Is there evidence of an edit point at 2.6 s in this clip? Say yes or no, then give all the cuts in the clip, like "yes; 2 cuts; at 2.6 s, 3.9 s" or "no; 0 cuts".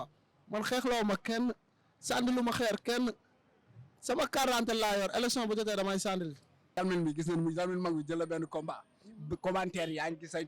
no; 1 cut; at 6.8 s